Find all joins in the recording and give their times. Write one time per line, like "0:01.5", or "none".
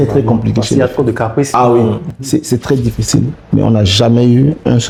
none